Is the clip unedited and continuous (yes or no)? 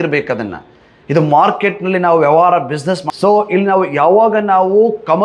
no